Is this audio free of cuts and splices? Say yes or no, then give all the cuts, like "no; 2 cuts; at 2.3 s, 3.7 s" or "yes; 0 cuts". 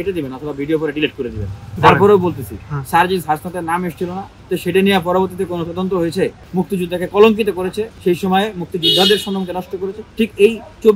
no; 5 cuts; at 1.7 s, 4.3 s, 6.4 s, 7.9 s, 10.0 s